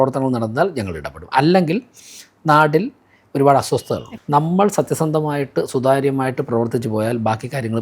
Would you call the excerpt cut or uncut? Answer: cut